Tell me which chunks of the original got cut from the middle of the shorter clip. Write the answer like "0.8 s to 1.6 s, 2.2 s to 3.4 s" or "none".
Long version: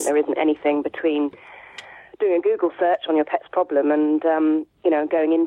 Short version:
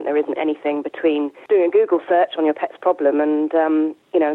1.4 s to 2.1 s